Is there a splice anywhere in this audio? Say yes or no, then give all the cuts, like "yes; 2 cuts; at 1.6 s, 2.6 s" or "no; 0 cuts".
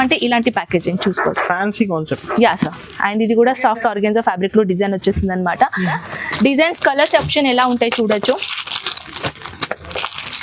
yes; 1 cut; at 6.0 s